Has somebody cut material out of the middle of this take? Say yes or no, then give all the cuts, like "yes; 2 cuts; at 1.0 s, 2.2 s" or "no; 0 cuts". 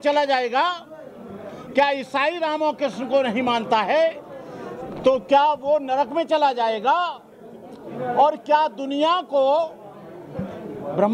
no; 0 cuts